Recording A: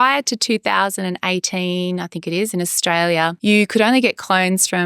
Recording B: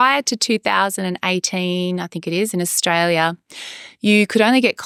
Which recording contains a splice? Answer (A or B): A